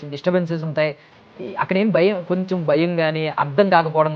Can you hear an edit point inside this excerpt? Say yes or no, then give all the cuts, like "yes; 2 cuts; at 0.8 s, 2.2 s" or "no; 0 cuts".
no; 0 cuts